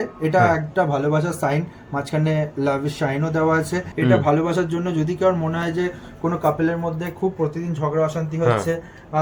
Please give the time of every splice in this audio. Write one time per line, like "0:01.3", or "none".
0:03.9